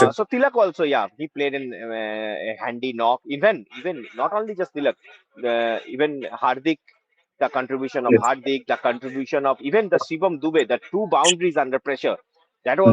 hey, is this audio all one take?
yes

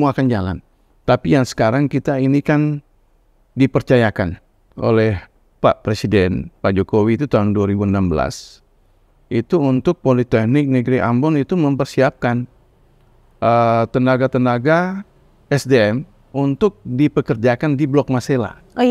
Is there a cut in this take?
no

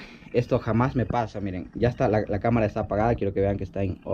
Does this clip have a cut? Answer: no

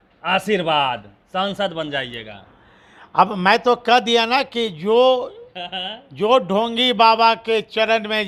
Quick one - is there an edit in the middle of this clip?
no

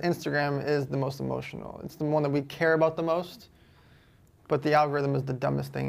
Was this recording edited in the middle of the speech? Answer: no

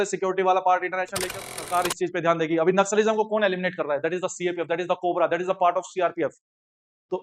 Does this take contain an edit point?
yes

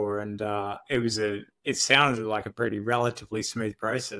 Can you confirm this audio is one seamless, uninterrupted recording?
yes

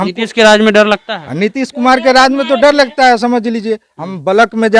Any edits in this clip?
no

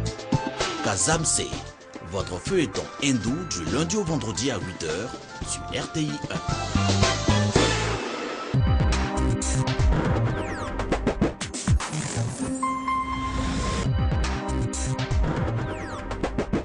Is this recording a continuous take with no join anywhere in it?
no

